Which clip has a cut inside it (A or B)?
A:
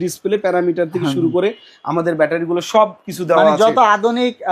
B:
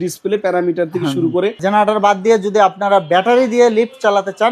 B